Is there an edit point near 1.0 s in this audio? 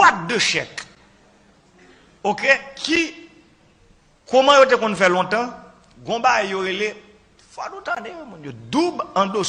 no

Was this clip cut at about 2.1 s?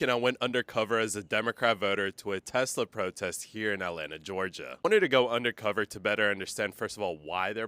yes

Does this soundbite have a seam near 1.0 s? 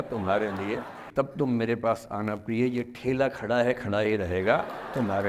yes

